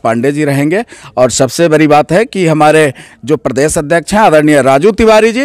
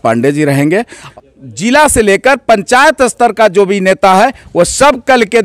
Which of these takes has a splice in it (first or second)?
second